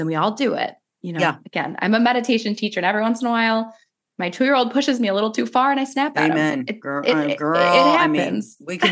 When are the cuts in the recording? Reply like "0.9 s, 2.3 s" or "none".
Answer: none